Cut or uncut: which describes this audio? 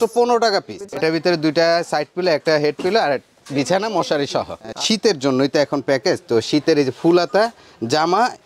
cut